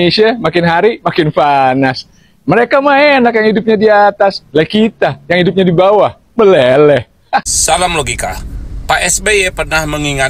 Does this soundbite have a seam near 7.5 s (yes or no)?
yes